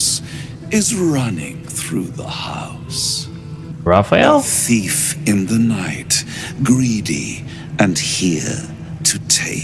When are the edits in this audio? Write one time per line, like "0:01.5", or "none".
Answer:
0:03.7